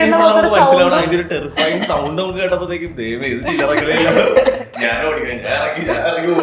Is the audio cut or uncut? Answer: uncut